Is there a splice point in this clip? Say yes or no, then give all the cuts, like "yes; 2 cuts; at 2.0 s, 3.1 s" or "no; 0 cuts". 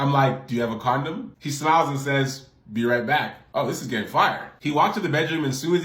no; 0 cuts